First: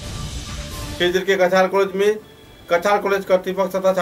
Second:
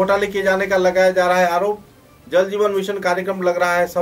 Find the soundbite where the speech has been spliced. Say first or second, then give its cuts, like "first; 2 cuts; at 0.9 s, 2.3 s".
first; 1 cut; at 1.0 s